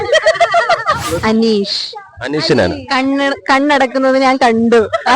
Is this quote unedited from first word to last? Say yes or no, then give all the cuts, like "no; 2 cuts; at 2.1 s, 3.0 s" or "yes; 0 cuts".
no; 1 cut; at 1.2 s